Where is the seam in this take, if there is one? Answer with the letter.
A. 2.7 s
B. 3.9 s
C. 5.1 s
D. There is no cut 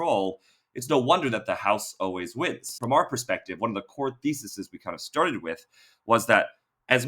A